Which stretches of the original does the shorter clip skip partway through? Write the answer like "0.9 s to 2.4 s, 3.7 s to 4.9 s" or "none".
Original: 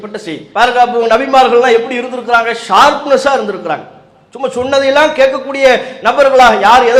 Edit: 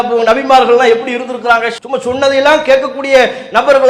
2.6 s to 4.2 s